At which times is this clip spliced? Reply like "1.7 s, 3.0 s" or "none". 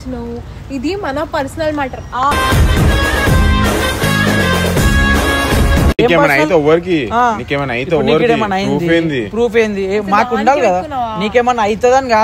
none

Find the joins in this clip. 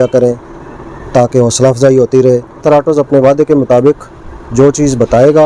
2.5 s

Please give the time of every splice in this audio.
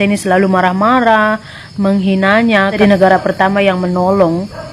2.7 s

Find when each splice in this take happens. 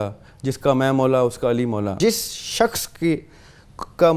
2.0 s

